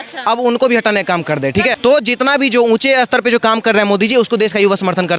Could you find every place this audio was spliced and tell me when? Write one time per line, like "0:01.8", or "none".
0:01.8

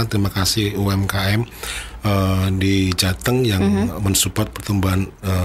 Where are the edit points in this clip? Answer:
none

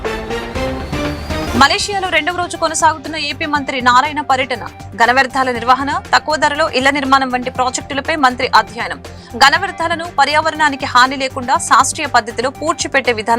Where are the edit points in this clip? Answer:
0:01.4

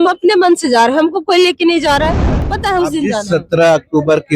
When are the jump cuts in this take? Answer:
0:02.5

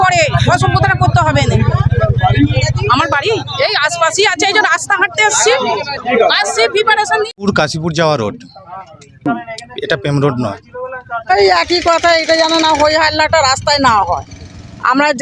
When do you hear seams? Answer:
0:07.3
0:11.3

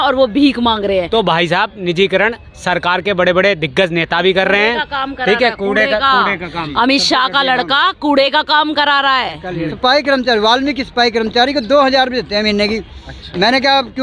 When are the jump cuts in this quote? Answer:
0:01.1
0:09.7

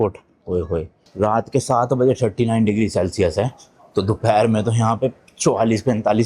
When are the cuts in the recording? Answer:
0:01.0

